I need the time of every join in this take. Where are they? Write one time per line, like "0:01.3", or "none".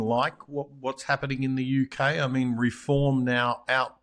none